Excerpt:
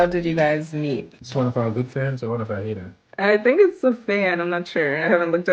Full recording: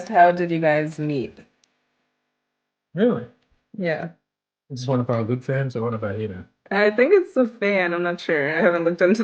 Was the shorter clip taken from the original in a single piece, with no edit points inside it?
no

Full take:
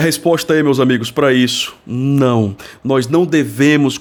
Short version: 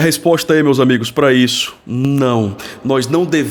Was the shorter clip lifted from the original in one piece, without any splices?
yes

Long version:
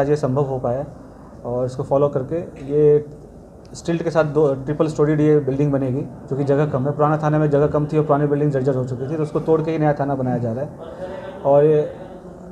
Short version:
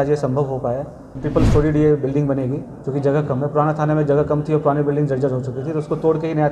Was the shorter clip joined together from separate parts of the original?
yes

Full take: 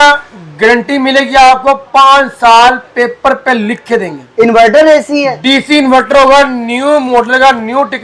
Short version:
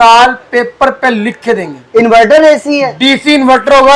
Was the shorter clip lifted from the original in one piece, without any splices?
yes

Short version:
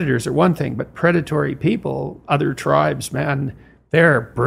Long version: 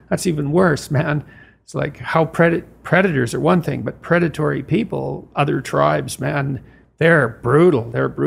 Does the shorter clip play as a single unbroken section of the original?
yes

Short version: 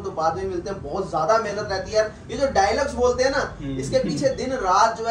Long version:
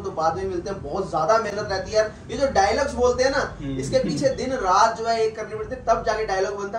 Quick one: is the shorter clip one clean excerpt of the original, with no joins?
yes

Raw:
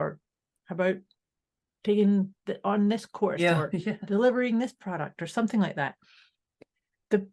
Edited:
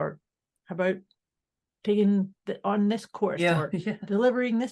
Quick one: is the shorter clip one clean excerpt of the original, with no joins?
yes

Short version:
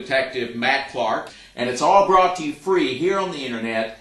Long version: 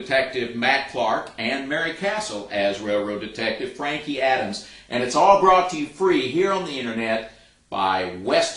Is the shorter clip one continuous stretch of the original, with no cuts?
no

